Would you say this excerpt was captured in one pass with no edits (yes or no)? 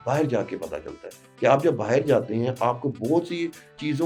yes